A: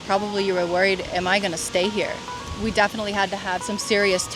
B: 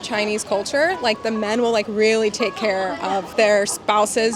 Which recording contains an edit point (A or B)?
B